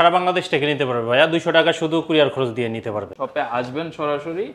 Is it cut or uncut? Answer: cut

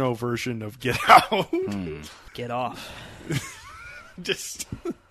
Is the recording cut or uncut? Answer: cut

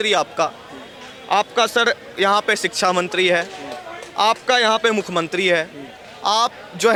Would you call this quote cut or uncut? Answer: uncut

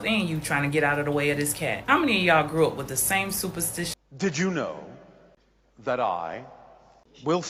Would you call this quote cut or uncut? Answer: cut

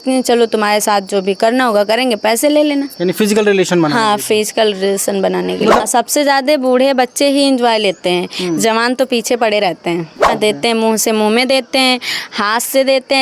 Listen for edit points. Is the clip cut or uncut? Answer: cut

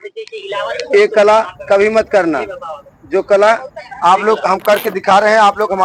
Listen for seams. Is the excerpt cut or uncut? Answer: uncut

